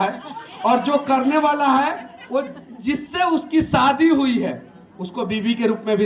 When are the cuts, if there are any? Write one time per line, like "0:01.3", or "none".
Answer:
none

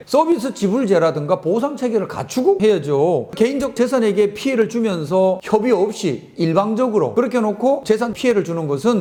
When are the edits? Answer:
none

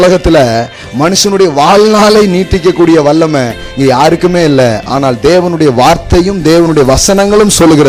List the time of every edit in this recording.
none

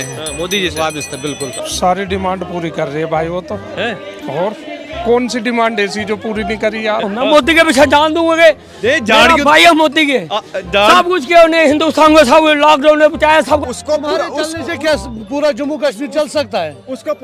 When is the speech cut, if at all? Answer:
0:01.5
0:07.1
0:13.6

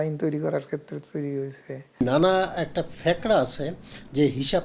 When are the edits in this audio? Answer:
0:02.0

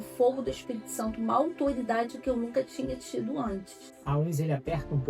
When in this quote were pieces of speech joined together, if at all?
0:03.9

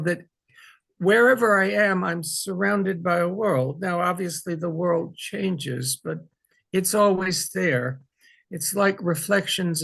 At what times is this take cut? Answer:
none

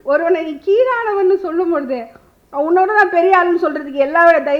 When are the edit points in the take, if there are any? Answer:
none

